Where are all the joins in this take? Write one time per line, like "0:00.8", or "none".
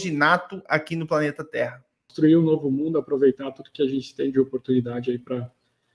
0:02.1